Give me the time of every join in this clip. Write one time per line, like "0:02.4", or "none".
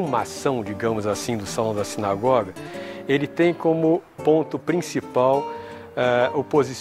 none